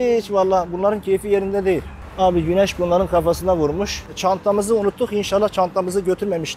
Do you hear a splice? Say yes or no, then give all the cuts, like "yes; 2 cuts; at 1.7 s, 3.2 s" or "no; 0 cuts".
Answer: yes; 2 cuts; at 2.0 s, 4.0 s